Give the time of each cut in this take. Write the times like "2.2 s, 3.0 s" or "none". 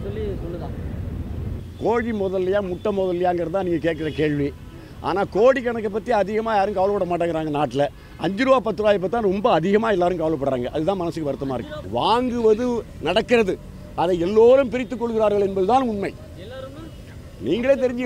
11.8 s